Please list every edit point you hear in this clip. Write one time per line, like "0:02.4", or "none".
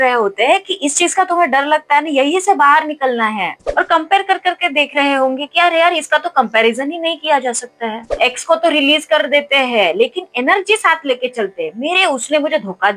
0:03.5
0:08.2

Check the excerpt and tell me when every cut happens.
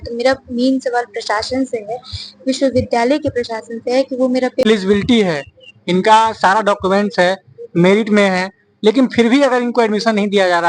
0:04.7

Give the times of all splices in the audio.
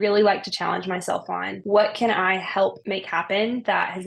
0:01.5
0:02.8

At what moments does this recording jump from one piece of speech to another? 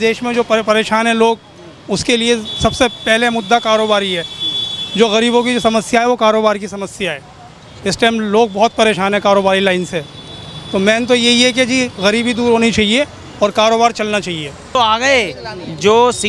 0:14.7

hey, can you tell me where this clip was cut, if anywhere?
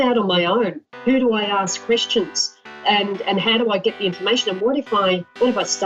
none

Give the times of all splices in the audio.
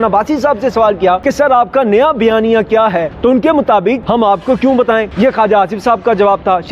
0:01.2
0:03.1
0:04.0
0:05.1

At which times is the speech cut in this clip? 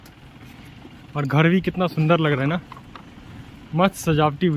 none

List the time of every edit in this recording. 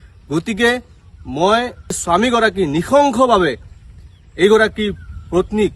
0:02.0

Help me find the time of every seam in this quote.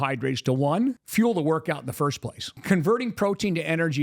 0:01.0
0:02.6

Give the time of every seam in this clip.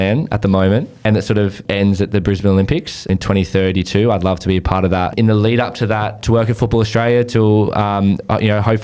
0:01.4
0:03.1
0:05.1
0:06.2

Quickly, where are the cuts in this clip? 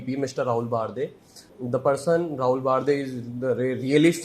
0:01.5

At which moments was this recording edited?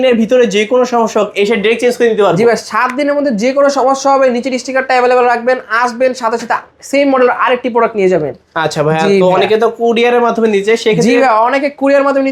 none

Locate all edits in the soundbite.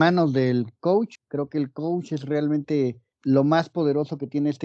0:01.2

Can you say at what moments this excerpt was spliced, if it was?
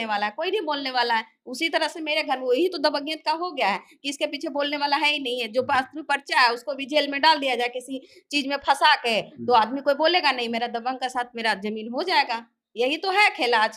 none

